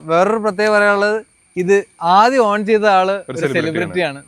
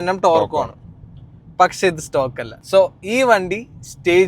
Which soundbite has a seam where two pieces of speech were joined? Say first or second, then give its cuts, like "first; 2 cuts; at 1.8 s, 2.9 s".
second; 1 cut; at 2.5 s